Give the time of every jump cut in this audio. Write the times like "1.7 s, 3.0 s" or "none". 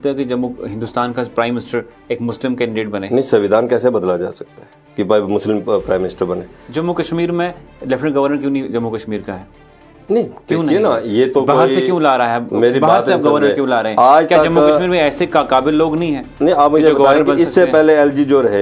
6.6 s